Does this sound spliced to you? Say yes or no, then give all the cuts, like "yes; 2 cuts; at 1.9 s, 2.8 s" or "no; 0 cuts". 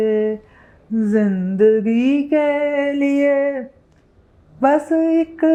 no; 0 cuts